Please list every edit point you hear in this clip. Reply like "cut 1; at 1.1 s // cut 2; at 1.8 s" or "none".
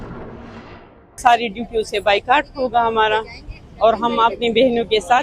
cut 1; at 1.2 s